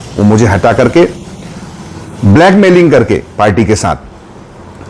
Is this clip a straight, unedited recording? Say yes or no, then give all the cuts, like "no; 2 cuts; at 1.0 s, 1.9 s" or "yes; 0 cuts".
yes; 0 cuts